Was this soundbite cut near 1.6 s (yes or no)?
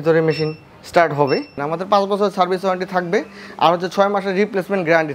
yes